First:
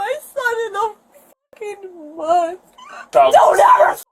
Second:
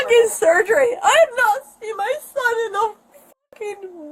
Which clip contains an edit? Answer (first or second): first